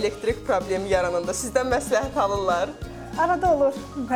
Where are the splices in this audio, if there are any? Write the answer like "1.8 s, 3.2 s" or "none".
none